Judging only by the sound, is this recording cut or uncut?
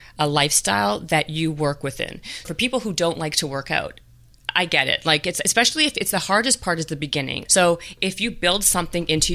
cut